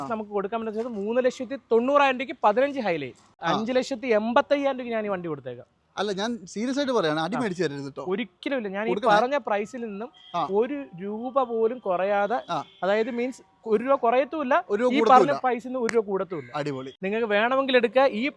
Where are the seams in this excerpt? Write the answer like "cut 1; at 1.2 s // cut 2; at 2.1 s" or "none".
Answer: cut 1; at 3.4 s // cut 2; at 17.0 s

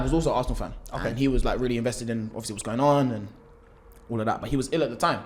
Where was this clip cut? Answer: none

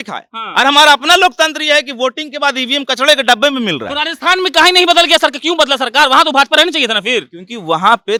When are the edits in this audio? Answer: none

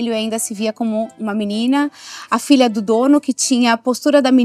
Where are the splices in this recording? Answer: none

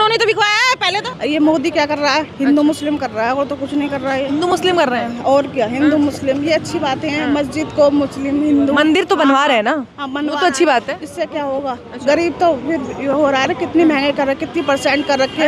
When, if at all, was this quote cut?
cut 1; at 1.0 s

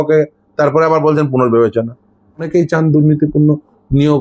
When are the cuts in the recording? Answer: cut 1; at 2.5 s

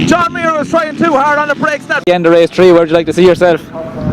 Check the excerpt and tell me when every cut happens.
cut 1; at 2.0 s

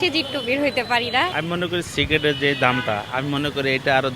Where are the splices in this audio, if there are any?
cut 1; at 1.4 s

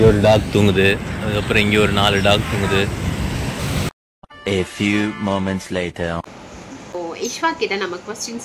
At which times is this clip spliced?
cut 1; at 3.6 s // cut 2; at 6.9 s

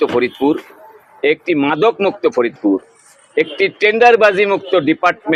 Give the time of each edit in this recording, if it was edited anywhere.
none

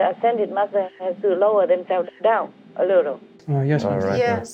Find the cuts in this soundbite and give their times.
none

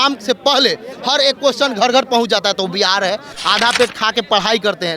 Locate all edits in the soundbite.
cut 1; at 3.3 s

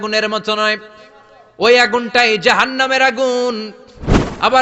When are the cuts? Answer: none

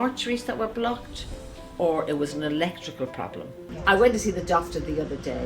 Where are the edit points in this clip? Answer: cut 1; at 3.6 s

